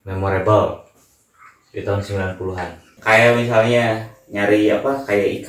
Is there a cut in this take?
yes; 1 cut; at 2.9 s

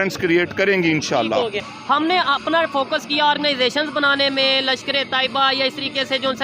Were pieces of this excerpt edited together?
yes; 1 cut; at 1.7 s

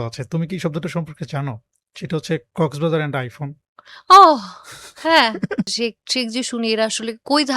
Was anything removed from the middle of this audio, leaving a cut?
yes; 1 cut; at 5.7 s

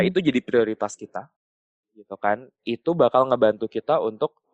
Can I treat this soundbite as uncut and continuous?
yes; 0 cuts

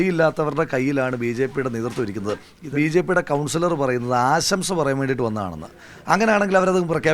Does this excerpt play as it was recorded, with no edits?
no; 1 cut; at 2.5 s

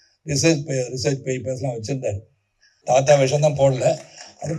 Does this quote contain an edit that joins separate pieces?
yes; 1 cut; at 2.7 s

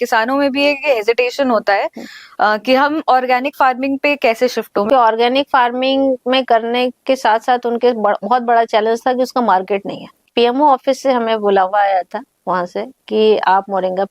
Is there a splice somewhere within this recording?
yes; 2 cuts; at 4.9 s, 10.2 s

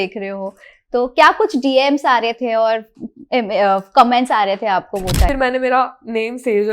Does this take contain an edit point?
yes; 1 cut; at 5.3 s

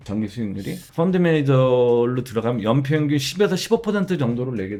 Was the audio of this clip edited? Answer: no; 0 cuts

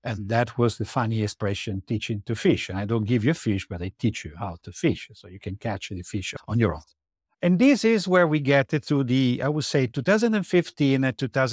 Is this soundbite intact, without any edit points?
no; 1 cut; at 6.3 s

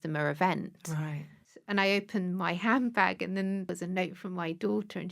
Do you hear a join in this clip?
yes; 2 cuts; at 1.5 s, 3.7 s

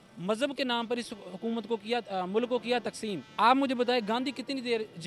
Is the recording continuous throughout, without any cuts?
no; 1 cut; at 3.3 s

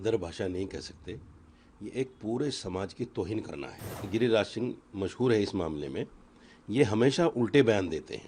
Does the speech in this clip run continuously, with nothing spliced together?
no; 1 cut; at 4.0 s

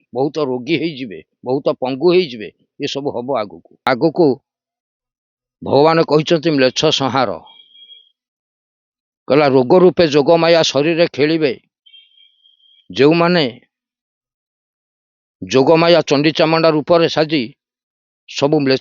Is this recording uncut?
no; 1 cut; at 3.9 s

